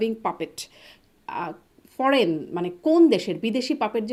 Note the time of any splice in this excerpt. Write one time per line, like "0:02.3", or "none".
none